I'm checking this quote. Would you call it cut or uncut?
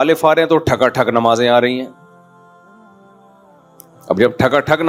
uncut